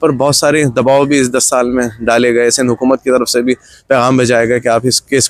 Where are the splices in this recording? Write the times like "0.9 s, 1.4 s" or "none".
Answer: none